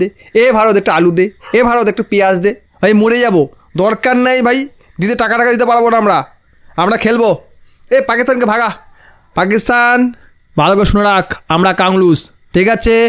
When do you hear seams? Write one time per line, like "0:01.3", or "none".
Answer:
0:02.7